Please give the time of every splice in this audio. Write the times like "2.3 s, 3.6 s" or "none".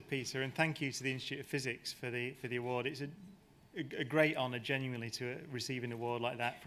1.8 s